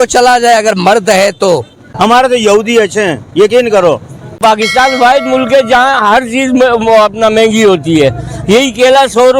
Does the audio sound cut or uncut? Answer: cut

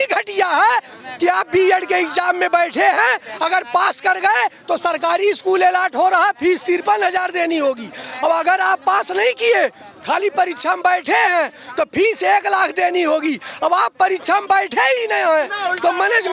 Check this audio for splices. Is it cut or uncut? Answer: uncut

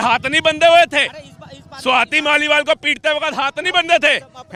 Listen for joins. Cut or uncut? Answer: uncut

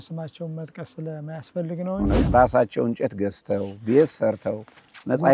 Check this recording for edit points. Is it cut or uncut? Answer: cut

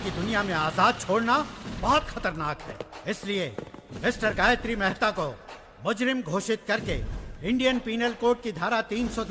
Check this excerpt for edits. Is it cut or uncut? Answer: uncut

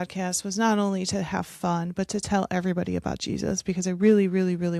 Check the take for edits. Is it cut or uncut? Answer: uncut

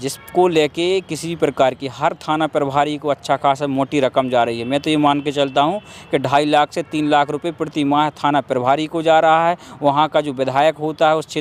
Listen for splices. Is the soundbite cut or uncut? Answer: uncut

